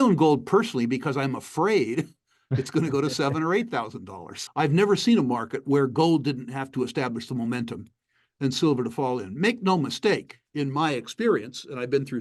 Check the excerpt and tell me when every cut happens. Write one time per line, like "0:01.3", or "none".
0:04.4

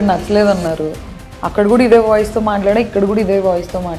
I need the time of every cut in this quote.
none

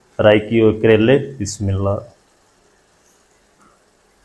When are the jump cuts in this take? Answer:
none

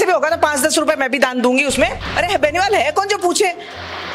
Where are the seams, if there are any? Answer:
0:02.0

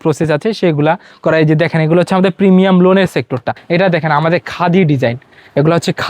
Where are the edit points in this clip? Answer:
0:03.5

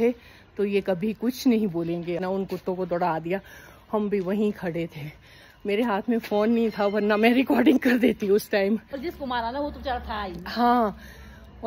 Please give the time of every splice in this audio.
0:02.2
0:09.0

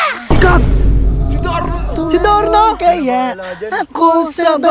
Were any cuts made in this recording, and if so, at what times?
none

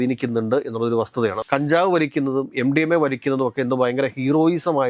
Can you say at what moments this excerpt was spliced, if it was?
0:01.4

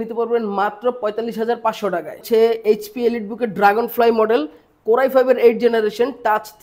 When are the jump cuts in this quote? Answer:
0:02.2

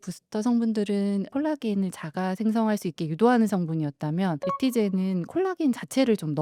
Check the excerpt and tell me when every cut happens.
none

